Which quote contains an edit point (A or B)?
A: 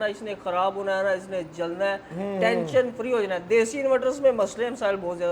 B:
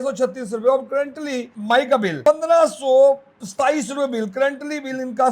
B